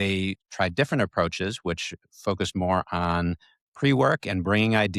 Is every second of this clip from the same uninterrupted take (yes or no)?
yes